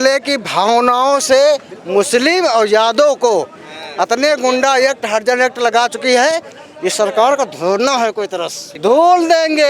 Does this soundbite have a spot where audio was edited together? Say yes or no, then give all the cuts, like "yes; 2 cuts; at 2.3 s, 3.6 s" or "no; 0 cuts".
yes; 1 cut; at 8.6 s